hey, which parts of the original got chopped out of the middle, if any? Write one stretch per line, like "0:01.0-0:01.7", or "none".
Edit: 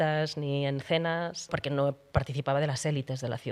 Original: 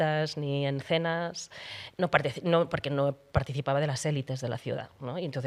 0:01.6-0:02.8